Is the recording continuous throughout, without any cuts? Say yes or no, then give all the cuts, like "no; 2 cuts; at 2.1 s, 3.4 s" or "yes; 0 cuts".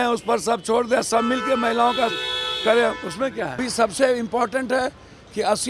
no; 1 cut; at 3.6 s